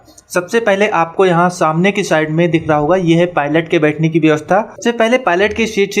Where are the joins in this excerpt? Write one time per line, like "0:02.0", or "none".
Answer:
0:04.7